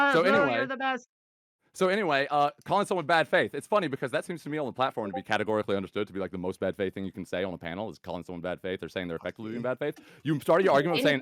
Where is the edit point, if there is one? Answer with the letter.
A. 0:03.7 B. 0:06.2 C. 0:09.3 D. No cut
D